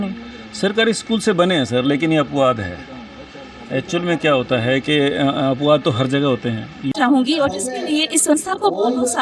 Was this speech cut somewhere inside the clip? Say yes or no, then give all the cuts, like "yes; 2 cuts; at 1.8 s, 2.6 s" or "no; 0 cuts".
yes; 1 cut; at 6.9 s